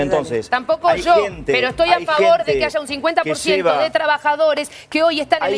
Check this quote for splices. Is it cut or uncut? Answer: uncut